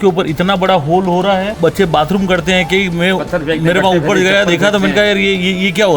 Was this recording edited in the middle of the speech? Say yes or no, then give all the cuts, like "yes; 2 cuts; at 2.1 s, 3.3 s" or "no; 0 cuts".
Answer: yes; 1 cut; at 1.5 s